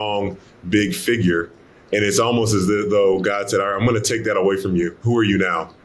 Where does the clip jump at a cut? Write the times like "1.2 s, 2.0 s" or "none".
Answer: none